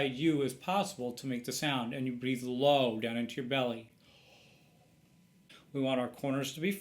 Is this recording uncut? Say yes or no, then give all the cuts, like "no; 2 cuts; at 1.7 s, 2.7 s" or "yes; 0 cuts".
no; 1 cut; at 5.5 s